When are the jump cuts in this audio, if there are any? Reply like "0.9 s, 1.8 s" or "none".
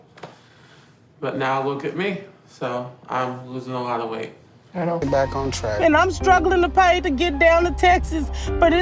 5.0 s